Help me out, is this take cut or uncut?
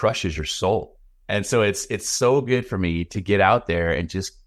uncut